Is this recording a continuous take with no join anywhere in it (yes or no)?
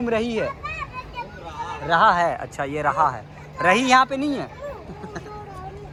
yes